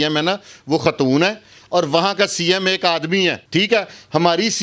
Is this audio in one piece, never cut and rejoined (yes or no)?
no